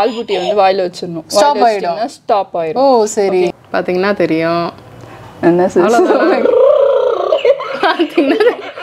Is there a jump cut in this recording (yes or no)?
yes